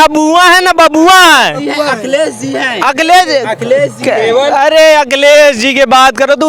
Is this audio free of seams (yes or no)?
yes